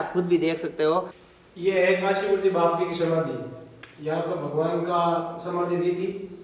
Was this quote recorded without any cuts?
no; 1 cut; at 1.5 s

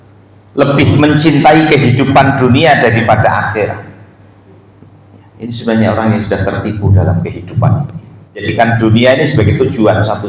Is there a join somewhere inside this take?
yes; 1 cut; at 8.5 s

